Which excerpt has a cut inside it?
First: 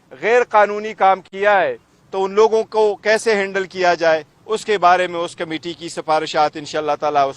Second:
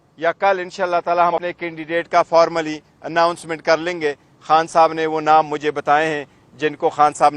second; 1 cut; at 1.4 s

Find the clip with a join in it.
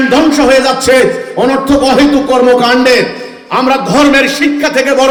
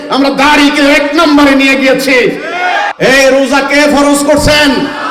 second; 1 cut; at 2.4 s

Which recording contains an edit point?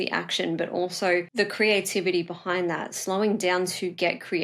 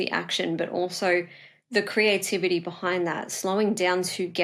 first; 1 cut; at 1.3 s

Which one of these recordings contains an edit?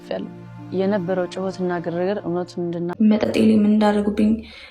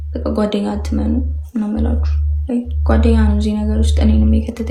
first; 1 cut; at 2.9 s

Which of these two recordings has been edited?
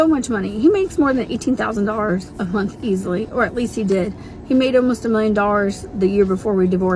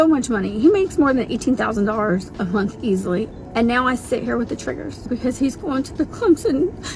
second; 2 cuts; at 3.3 s, 5.1 s

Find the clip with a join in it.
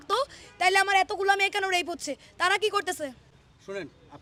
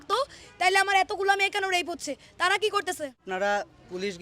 second; 1 cut; at 3.2 s

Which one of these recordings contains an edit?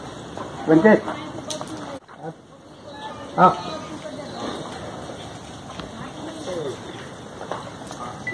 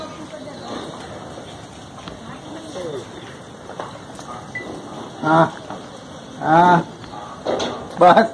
first; 1 cut; at 2.0 s

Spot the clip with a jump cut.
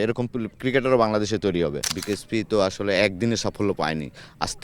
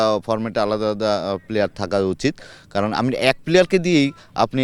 first; 1 cut; at 1.9 s

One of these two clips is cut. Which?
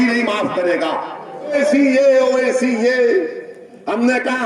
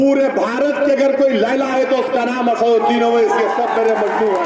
first; 1 cut; at 1.5 s

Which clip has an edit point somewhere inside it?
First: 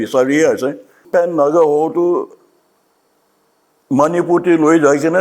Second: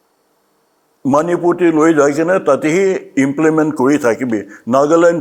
first; 1 cut; at 1.0 s

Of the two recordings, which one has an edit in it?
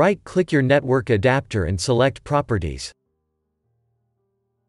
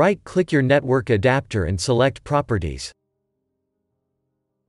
first; 1 cut; at 2.9 s

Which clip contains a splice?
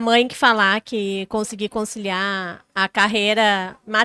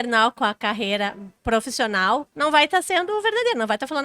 second; 2 cuts; at 1.3 s, 2.3 s

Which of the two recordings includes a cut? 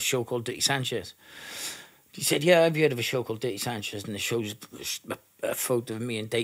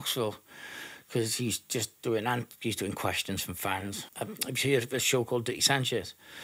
second; 1 cut; at 4.0 s

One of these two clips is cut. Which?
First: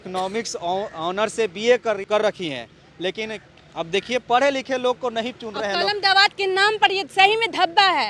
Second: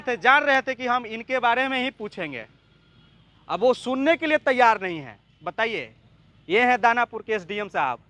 first; 1 cut; at 2.0 s

